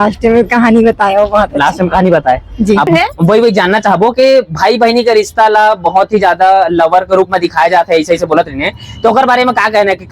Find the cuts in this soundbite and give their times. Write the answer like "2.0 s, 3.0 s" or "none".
2.9 s